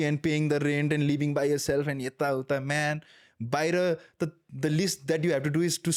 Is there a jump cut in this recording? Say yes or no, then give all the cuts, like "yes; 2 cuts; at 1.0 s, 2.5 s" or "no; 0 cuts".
no; 0 cuts